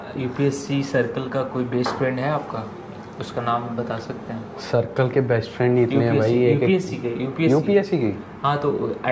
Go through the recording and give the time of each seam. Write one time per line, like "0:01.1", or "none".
none